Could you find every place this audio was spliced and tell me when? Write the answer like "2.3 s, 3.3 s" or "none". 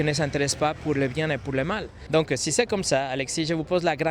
1.9 s